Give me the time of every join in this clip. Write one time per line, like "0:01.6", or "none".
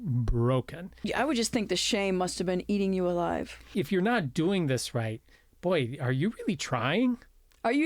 0:01.1
0:03.7